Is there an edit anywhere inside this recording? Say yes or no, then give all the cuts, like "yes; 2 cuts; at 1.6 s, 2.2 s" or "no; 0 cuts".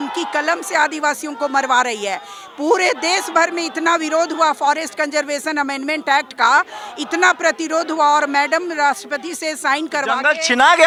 no; 0 cuts